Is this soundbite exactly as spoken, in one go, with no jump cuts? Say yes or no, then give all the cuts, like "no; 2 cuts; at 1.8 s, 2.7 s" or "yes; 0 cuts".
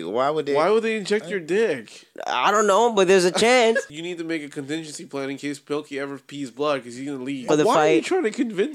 no; 2 cuts; at 4.0 s, 7.4 s